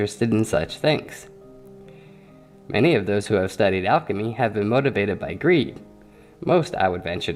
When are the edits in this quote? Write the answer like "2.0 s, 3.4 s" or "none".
none